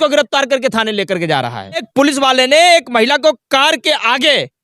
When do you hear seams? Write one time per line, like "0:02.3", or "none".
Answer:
0:01.9